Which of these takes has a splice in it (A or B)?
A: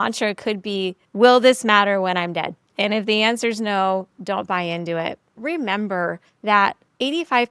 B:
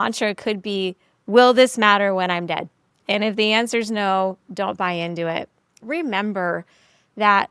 A